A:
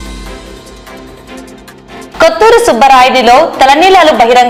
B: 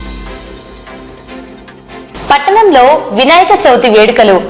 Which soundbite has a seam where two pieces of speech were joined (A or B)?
B